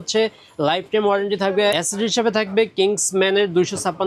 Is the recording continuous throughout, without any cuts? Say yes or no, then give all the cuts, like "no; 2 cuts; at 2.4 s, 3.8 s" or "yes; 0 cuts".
no; 1 cut; at 1.7 s